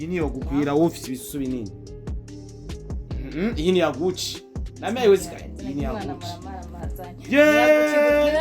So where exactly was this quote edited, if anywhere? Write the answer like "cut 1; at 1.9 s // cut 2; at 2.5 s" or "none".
cut 1; at 1.7 s // cut 2; at 3.2 s

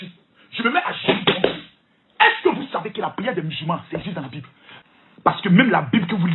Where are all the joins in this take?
cut 1; at 4.9 s

